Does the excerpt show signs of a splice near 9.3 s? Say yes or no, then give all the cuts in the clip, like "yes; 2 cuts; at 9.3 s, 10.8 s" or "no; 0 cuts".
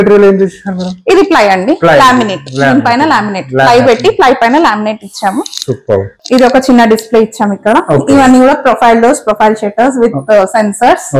no; 1 cut; at 6.1 s